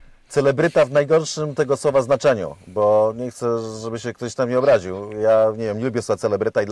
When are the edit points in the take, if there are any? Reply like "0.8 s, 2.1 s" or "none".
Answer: none